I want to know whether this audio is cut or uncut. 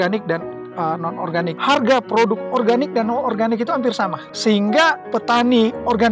cut